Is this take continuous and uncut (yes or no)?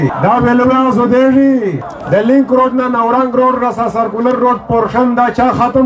no